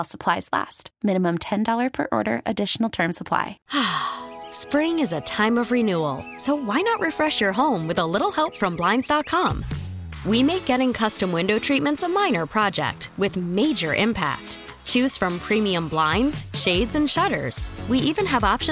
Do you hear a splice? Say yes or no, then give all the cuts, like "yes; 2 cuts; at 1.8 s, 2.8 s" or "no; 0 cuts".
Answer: yes; 1 cut; at 3.6 s